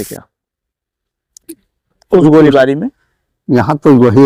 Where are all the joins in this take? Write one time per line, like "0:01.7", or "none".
none